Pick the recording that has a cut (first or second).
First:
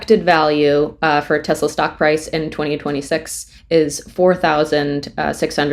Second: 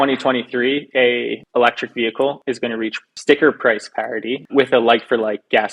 second